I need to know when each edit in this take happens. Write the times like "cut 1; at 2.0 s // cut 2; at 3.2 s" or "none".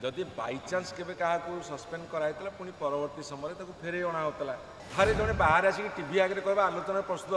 cut 1; at 4.8 s